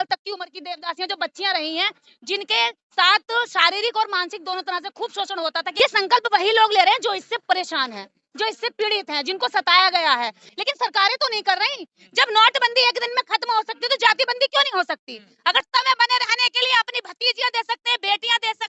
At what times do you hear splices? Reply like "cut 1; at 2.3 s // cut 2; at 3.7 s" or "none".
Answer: cut 1; at 5.7 s // cut 2; at 10.5 s // cut 3; at 15.6 s